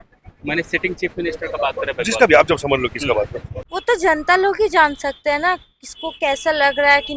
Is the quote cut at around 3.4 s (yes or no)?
yes